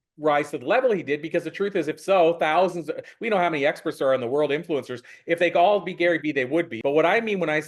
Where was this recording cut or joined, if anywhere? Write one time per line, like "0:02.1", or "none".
0:06.7